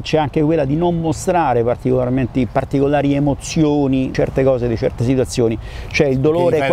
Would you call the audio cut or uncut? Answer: uncut